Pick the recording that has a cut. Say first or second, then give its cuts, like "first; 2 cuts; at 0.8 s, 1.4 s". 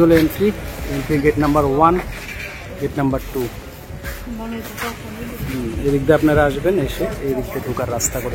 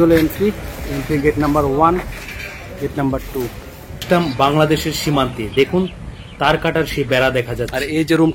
second; 1 cut; at 4.0 s